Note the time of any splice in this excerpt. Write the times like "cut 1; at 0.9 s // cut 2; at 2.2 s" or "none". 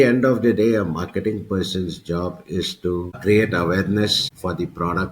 cut 1; at 3.2 s // cut 2; at 4.3 s

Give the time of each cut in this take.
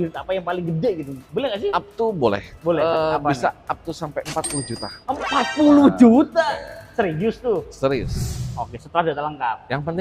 cut 1; at 8.4 s

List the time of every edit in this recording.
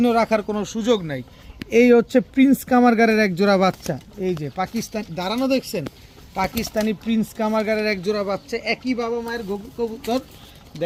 none

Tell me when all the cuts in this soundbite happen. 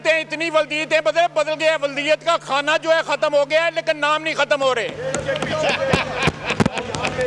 none

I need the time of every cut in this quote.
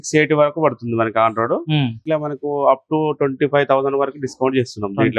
cut 1; at 2.1 s

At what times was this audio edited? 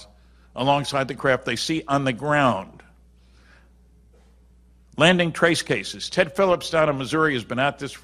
none

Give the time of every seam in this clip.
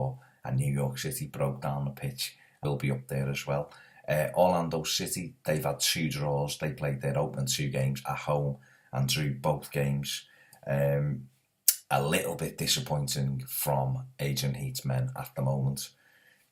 none

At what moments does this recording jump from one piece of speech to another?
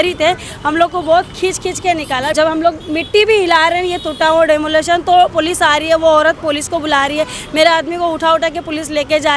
cut 1; at 2.3 s

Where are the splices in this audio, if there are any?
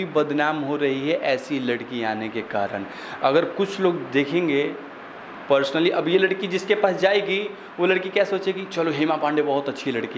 none

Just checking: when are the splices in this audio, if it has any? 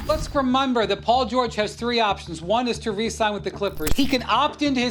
cut 1; at 3.8 s

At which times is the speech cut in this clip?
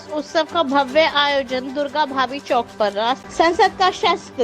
cut 1; at 3.2 s

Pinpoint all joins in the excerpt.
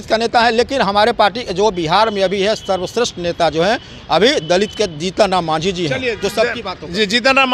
none

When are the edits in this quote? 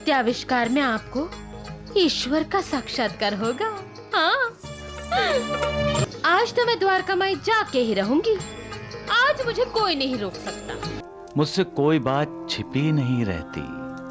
cut 1; at 6.1 s // cut 2; at 11.0 s

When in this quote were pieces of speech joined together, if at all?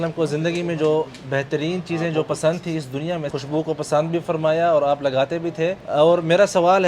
cut 1; at 3.3 s // cut 2; at 5.8 s

